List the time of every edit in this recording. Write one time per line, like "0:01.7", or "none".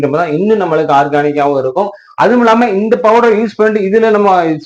none